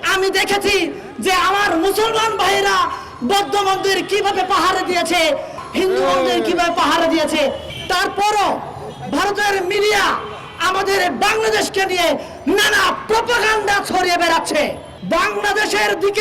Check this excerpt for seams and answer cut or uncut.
cut